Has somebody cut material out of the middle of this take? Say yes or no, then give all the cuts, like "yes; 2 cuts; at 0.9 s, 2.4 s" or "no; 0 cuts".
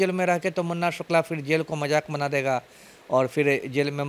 no; 0 cuts